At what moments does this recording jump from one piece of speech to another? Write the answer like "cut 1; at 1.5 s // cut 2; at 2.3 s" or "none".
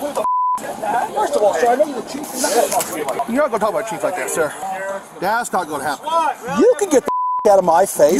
cut 1; at 1.1 s // cut 2; at 3.2 s // cut 3; at 4.6 s